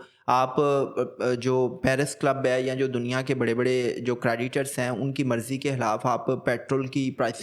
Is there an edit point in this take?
no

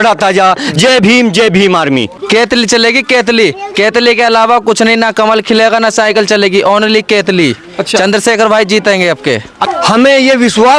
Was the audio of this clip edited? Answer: yes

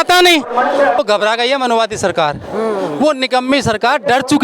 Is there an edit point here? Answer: yes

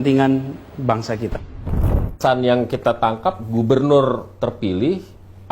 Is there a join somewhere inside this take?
yes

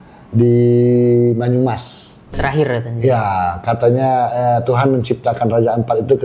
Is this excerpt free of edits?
no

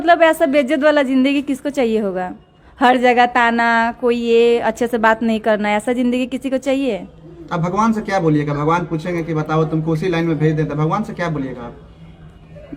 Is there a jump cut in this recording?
no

